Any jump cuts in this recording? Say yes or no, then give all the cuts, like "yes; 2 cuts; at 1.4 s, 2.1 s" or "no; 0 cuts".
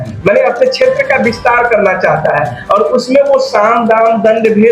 no; 0 cuts